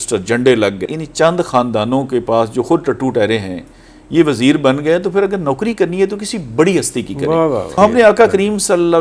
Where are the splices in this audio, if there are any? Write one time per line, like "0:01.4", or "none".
0:00.9
0:07.8